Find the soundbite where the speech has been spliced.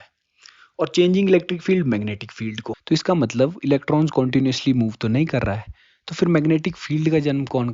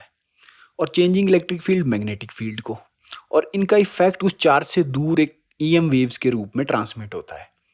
first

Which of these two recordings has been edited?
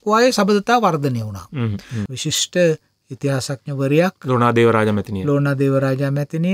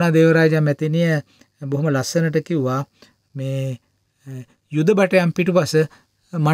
first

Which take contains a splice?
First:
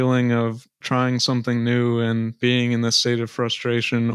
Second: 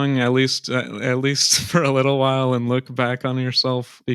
first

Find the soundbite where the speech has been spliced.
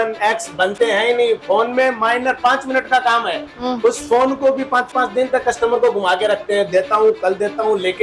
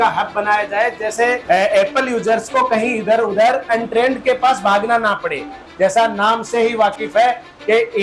second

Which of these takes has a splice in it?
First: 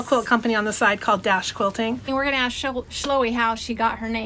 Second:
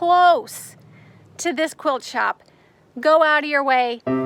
first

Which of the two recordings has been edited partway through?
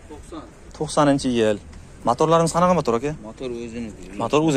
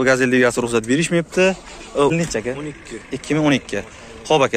second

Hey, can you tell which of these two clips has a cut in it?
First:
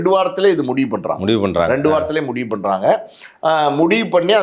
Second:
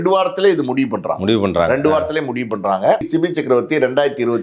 second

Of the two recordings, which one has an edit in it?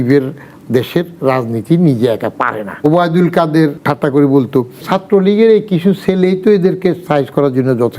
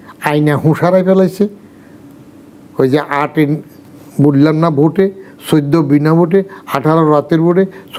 first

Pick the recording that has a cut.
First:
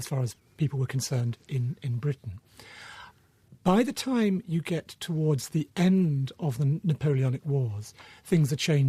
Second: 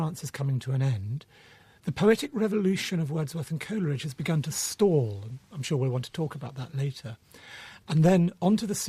first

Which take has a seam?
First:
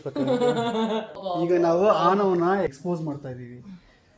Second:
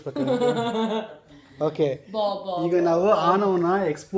first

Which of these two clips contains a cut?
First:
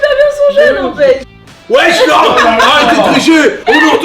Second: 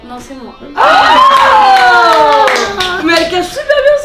first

